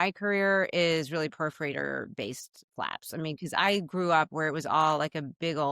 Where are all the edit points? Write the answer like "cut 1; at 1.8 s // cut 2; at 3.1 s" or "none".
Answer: none